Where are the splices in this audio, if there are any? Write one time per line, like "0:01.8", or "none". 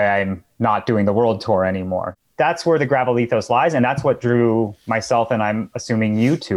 0:02.1